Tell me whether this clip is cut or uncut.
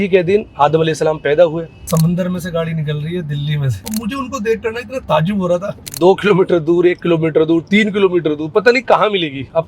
cut